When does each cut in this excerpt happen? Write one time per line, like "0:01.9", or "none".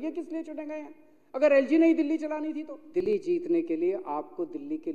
0:03.0